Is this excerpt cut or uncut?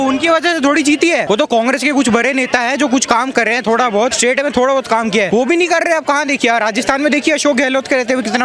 cut